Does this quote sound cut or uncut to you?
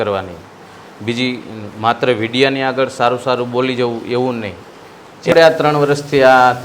cut